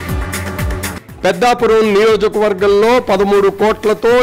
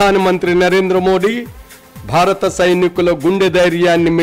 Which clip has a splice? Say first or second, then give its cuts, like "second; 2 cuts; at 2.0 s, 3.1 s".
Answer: first; 1 cut; at 0.9 s